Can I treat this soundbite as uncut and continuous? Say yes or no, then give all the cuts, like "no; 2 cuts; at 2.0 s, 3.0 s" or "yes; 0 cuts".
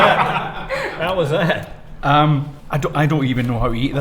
no; 1 cut; at 2.6 s